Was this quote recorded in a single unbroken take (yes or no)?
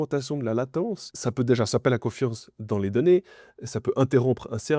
no